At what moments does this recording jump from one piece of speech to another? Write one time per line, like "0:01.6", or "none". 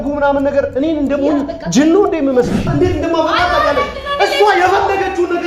0:02.7